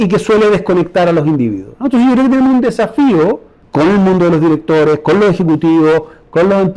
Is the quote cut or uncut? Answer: cut